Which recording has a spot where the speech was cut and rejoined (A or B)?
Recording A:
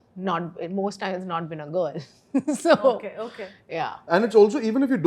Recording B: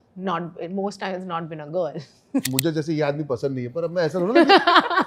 B